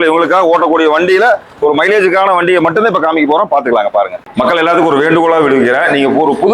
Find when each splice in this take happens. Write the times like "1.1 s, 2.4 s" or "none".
4.2 s